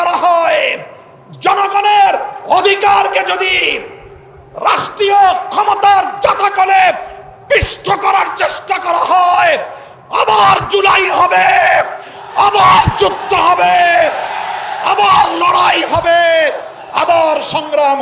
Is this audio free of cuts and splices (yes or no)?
yes